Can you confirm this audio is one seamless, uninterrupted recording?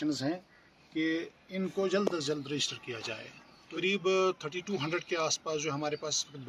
no; 1 cut; at 3.8 s

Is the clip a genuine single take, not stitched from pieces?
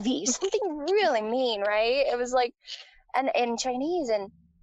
yes; 0 cuts

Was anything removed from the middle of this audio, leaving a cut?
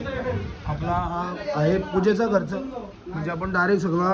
no; 0 cuts

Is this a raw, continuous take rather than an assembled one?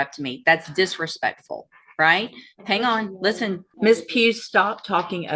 no; 1 cut; at 3.7 s

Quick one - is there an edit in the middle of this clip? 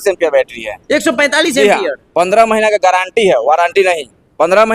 no; 0 cuts

